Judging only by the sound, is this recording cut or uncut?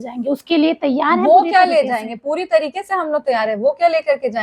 uncut